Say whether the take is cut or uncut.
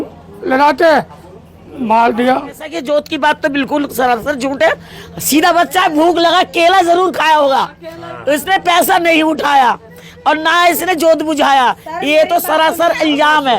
cut